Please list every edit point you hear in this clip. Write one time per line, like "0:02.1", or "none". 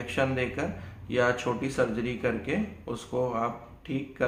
none